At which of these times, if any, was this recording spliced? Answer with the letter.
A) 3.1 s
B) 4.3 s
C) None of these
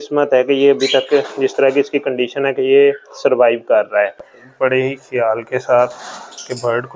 B